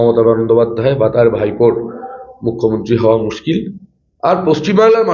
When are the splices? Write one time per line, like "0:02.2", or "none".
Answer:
none